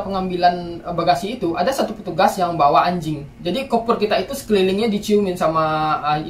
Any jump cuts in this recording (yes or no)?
no